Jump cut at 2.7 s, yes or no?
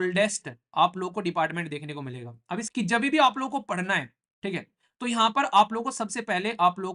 yes